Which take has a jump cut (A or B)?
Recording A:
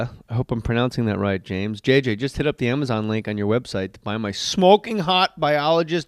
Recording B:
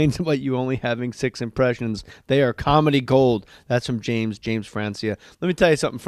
A